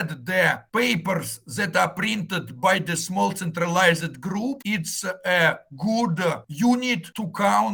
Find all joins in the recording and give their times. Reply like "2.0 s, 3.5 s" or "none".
none